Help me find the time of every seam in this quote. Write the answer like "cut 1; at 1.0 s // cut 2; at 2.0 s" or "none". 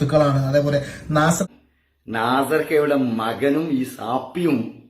cut 1; at 1.4 s